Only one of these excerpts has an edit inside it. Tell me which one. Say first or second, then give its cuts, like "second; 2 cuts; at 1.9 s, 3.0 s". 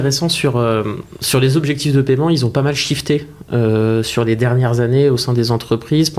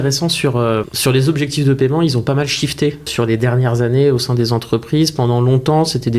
second; 2 cuts; at 0.9 s, 3.1 s